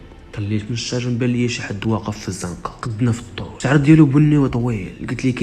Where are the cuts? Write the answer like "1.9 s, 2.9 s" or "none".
2.8 s, 3.5 s